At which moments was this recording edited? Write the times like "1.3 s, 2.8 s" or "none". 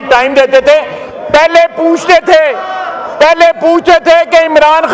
none